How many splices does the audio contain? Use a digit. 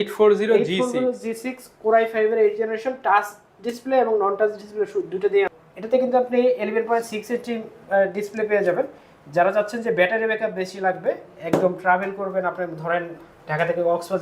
1